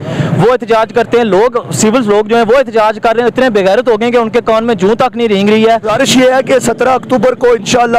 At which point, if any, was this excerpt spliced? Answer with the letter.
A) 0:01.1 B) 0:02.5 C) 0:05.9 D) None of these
C